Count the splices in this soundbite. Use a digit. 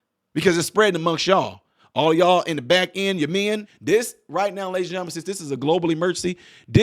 1